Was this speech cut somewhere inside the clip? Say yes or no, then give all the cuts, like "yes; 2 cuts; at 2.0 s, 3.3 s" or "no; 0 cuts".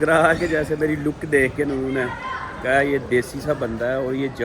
no; 0 cuts